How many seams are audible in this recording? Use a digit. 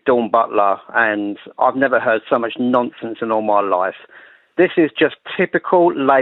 0